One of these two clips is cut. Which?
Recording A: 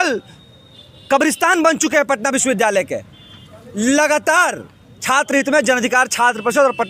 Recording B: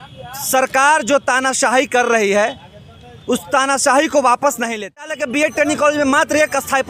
B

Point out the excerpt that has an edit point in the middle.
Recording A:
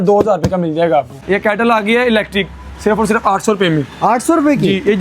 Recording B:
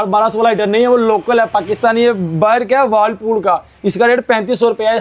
A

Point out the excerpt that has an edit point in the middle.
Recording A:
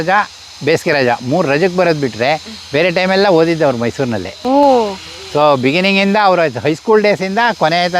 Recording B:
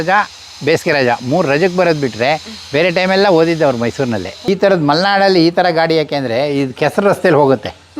B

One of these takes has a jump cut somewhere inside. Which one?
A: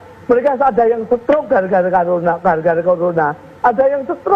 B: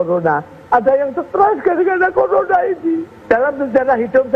B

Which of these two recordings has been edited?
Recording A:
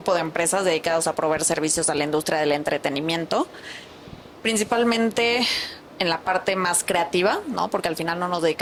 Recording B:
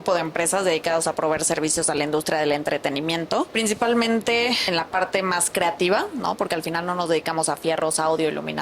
B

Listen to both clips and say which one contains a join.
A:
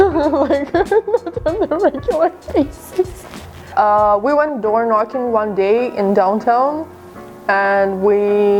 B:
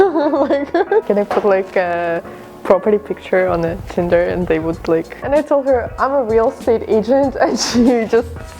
B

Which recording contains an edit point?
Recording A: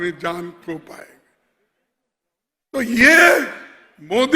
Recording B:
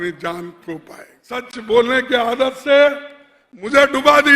B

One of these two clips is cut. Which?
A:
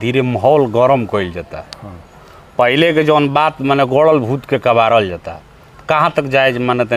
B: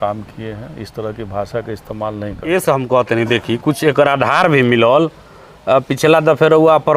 B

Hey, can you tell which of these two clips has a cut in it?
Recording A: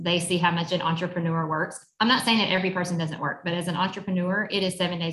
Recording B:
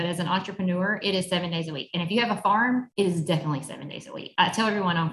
B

